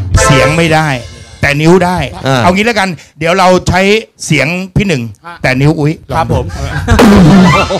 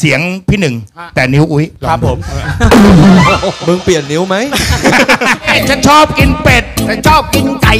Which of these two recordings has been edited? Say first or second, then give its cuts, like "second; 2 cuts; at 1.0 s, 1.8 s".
second; 1 cut; at 5.6 s